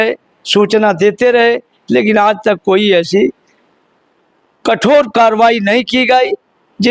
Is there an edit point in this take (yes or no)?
no